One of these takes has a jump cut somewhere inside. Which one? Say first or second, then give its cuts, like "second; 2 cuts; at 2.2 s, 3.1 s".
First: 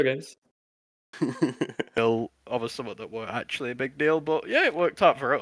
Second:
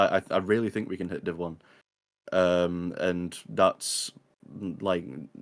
first; 1 cut; at 2.0 s